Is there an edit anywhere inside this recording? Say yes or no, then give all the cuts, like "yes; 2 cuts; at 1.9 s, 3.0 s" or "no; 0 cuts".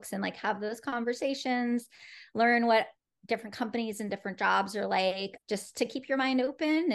yes; 1 cut; at 5.3 s